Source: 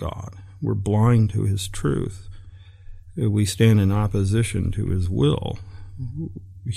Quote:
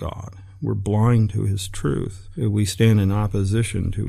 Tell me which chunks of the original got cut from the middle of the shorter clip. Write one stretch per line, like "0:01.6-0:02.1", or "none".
0:02.2-0:03.0